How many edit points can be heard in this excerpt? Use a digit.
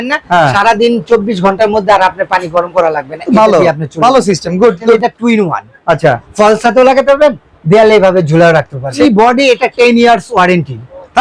2